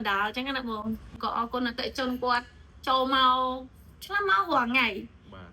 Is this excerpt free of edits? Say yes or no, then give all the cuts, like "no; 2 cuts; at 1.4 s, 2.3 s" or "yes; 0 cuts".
no; 1 cut; at 1.2 s